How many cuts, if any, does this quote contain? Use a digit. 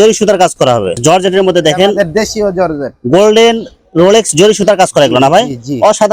1